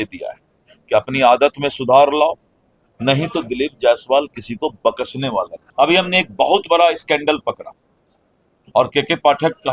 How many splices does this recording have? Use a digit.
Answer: 1